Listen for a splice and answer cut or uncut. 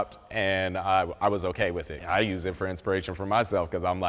cut